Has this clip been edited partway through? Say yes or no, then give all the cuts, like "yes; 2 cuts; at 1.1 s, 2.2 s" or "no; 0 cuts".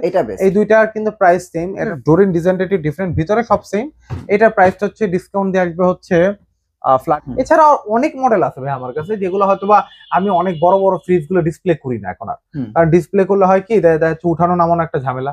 yes; 2 cuts; at 1.9 s, 7.1 s